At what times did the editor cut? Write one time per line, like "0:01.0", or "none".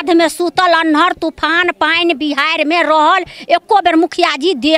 none